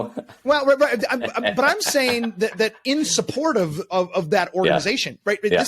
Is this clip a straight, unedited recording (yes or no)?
yes